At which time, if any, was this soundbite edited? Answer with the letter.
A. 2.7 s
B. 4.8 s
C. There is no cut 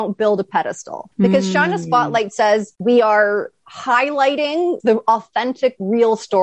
B